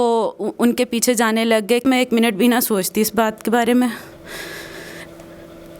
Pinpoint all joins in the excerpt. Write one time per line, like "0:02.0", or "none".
0:01.8